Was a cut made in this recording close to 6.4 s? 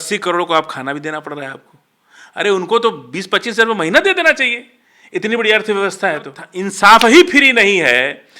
yes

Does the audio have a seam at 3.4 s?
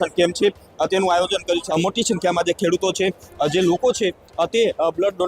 no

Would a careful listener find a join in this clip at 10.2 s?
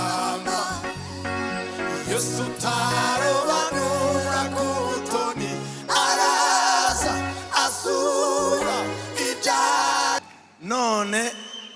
yes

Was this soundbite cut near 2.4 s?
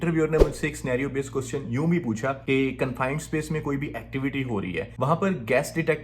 yes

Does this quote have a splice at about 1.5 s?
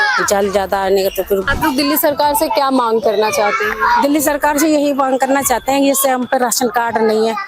yes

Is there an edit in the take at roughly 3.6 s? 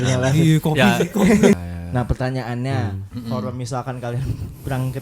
no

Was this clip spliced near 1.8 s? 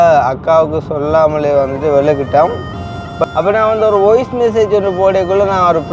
no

